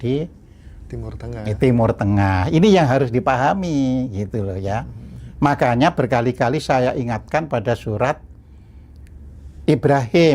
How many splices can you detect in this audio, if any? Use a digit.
0